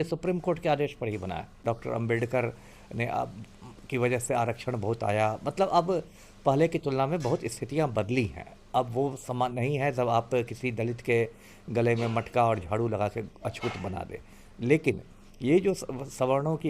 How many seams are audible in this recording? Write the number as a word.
one